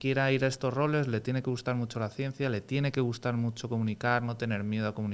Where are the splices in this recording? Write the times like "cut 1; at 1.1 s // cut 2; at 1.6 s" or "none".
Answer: none